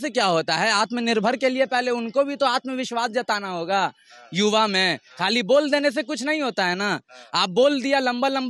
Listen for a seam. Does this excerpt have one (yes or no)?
no